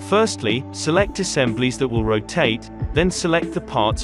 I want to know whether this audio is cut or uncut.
cut